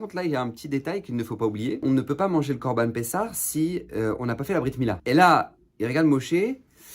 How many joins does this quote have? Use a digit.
2